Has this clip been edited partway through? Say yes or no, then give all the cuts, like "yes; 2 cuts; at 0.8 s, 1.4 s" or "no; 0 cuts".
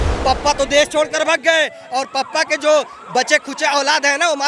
no; 0 cuts